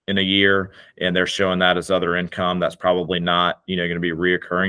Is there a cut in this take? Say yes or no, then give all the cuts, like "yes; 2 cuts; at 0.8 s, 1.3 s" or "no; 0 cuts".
no; 0 cuts